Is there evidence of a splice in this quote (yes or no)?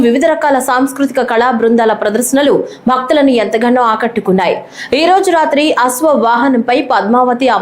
yes